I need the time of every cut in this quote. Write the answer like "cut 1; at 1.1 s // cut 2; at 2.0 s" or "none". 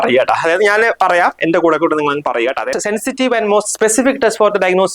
cut 1; at 2.8 s